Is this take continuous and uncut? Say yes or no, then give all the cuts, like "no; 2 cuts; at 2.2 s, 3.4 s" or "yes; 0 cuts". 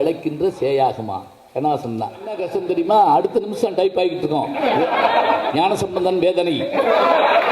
no; 1 cut; at 2.5 s